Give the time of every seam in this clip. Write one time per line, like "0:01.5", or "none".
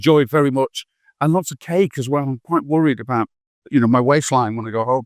none